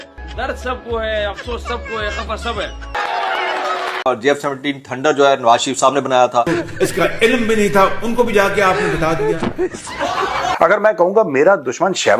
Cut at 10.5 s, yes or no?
yes